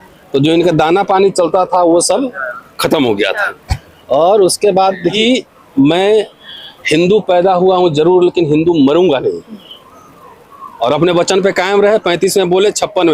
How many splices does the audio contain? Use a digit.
1